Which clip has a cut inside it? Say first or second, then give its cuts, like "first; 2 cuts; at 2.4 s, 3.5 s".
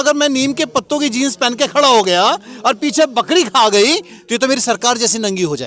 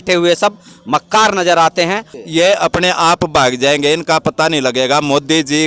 second; 1 cut; at 2.1 s